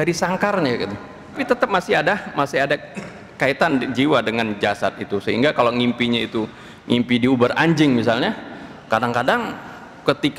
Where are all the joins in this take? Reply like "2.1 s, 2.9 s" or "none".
1.4 s